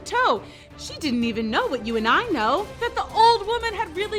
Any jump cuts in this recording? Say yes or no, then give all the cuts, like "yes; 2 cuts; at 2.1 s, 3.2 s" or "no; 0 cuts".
no; 0 cuts